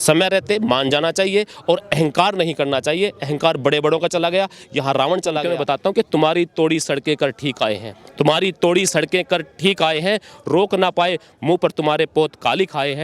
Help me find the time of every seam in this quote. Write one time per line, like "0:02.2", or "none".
0:05.5